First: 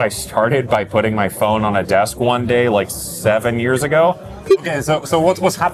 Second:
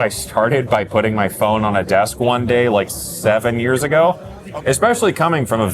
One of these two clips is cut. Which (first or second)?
second